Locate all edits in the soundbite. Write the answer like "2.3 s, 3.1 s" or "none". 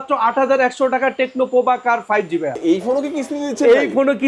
2.6 s